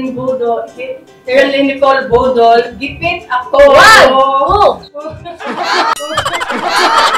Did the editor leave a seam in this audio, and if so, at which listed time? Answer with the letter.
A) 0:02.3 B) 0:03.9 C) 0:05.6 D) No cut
D